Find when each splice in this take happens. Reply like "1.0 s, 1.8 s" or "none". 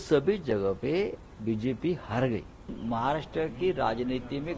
2.7 s